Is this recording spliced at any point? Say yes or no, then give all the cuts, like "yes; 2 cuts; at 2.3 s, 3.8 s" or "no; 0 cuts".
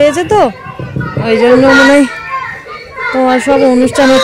no; 0 cuts